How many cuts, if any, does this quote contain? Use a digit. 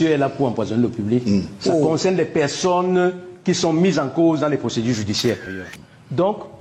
1